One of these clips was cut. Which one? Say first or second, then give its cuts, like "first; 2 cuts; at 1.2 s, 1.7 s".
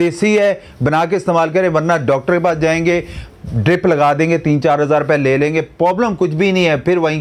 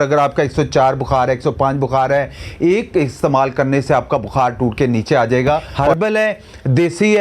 second; 1 cut; at 5.8 s